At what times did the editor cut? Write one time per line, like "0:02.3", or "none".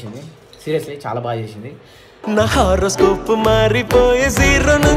none